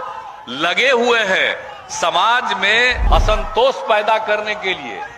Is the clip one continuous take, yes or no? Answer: no